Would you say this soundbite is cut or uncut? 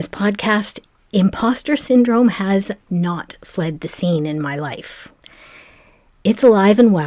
uncut